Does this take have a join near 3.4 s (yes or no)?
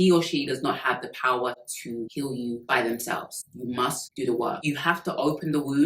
no